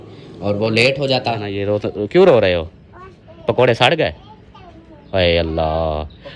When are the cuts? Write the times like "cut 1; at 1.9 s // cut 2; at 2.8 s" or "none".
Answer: cut 1; at 1.5 s